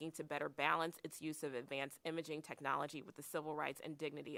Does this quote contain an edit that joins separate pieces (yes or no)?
no